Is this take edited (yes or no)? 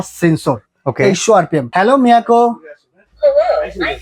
yes